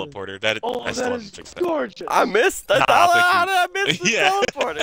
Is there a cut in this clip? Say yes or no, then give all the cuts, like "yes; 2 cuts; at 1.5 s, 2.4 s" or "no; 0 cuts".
no; 0 cuts